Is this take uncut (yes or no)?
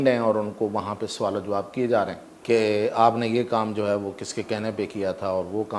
no